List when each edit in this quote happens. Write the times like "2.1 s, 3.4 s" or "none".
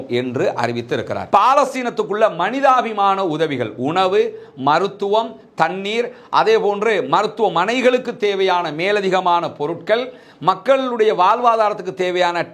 1.2 s